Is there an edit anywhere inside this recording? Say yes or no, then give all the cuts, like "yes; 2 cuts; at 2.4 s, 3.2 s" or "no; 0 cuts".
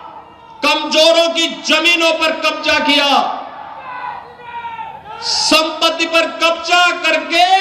no; 0 cuts